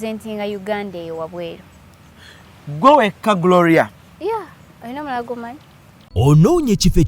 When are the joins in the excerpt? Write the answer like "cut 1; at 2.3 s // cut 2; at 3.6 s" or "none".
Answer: cut 1; at 6.0 s